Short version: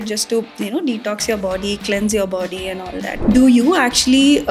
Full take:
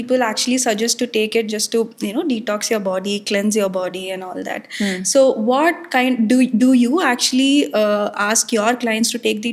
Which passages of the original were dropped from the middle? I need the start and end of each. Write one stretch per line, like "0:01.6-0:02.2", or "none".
0:04.7-0:06.5